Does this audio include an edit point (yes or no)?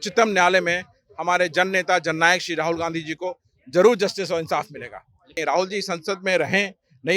yes